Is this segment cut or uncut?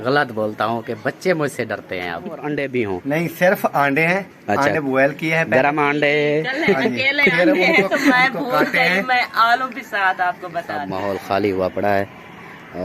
cut